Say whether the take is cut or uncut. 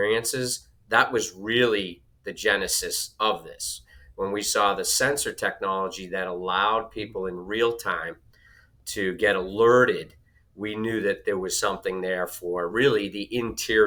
uncut